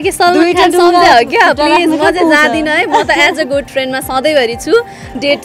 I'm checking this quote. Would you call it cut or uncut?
uncut